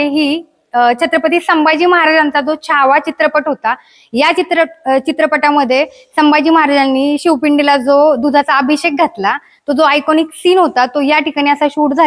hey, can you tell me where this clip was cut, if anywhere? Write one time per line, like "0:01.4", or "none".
none